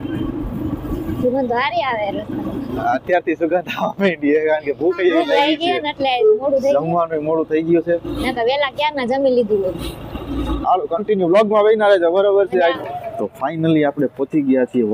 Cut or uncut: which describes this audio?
uncut